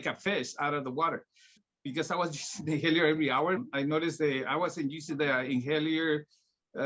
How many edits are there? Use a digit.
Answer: 2